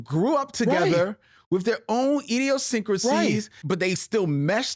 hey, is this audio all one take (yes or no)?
no